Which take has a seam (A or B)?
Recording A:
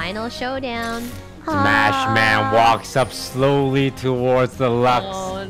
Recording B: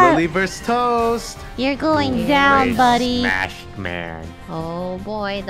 A